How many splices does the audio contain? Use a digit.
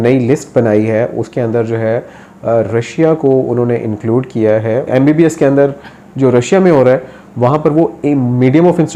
1